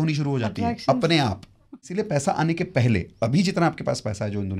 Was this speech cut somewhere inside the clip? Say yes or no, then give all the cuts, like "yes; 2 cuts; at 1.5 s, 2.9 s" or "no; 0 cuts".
yes; 1 cut; at 1.8 s